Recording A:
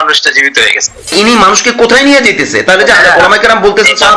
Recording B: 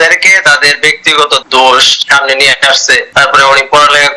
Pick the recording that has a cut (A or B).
A